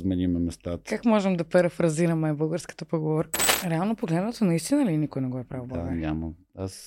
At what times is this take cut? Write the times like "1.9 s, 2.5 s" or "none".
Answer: 3.4 s